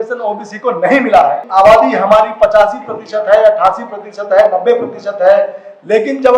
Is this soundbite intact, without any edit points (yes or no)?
no